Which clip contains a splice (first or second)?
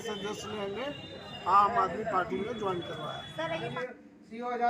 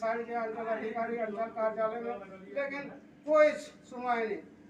first